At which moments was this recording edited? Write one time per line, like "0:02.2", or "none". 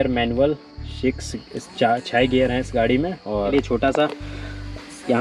0:03.5